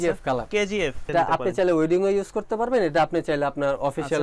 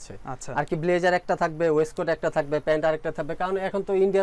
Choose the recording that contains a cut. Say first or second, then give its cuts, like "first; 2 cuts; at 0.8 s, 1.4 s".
first; 1 cut; at 1.1 s